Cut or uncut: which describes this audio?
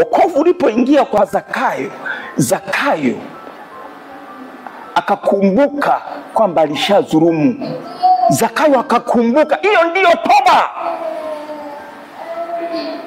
cut